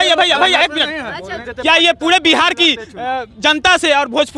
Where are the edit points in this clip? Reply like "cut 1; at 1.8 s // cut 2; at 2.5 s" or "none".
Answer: cut 1; at 1.4 s